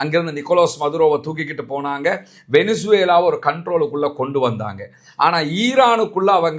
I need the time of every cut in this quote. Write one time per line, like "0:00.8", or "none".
none